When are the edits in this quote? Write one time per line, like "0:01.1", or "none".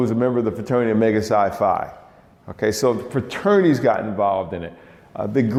none

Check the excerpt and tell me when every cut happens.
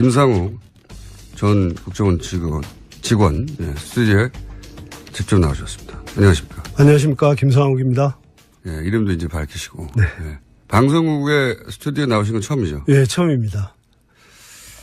none

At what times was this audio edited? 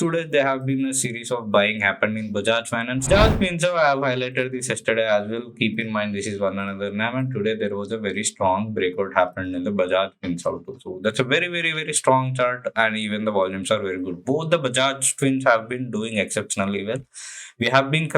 0:03.1

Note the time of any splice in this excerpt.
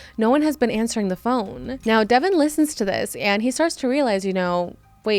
0:01.7

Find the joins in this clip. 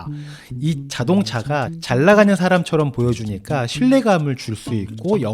0:01.7

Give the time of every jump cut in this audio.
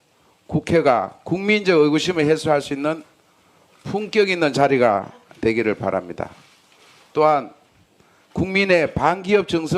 0:02.3

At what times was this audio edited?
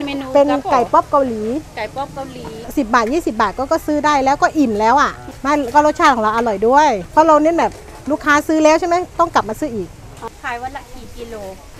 0:02.6
0:10.3

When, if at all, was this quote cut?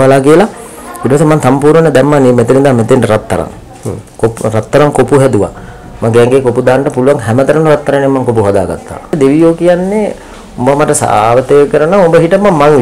0:09.0

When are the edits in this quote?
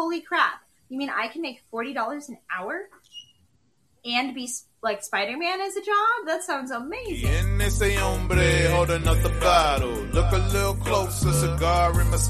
0:07.2

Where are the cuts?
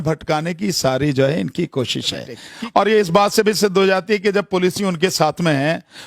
0:02.4

